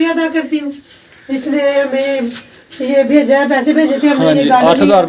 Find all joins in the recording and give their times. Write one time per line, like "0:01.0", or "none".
none